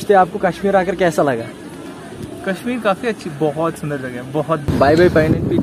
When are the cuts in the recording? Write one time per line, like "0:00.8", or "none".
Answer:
0:04.7